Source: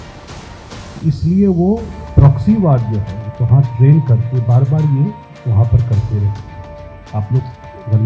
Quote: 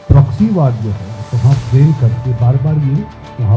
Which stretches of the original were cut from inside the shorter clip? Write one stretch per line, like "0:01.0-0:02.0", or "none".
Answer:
none